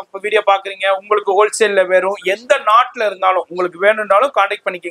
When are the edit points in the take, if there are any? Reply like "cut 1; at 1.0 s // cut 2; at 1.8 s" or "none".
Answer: none